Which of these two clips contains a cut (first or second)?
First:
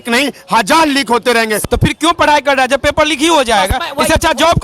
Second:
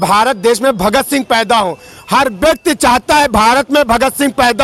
first